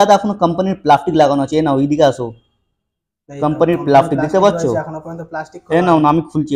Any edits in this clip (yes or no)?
no